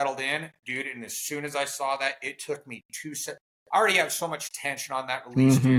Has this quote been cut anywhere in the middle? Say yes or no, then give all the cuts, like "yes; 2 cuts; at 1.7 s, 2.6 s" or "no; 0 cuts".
no; 0 cuts